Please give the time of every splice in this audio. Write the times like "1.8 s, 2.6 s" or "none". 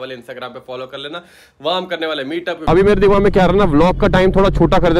2.6 s